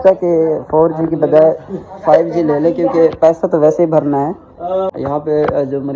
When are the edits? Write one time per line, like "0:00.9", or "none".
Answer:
0:04.9